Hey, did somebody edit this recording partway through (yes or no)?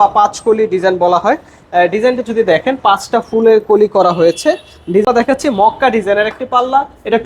yes